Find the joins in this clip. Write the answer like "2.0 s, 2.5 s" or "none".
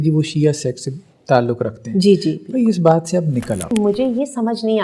3.7 s